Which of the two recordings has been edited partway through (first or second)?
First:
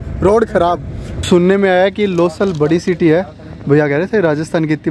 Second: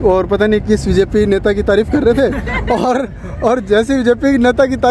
first